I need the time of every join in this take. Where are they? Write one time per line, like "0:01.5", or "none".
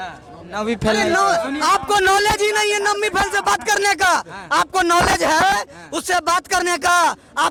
none